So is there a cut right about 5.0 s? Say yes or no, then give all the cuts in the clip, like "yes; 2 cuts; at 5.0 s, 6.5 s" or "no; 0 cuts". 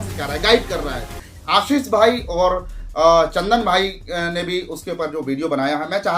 no; 1 cut; at 1.3 s